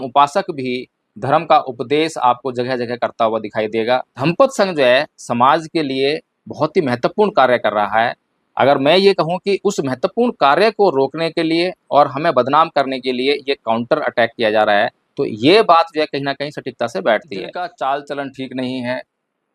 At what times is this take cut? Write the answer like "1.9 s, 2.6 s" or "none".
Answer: 4.1 s, 17.5 s